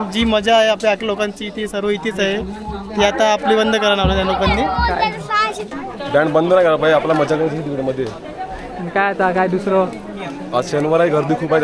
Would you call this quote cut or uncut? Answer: uncut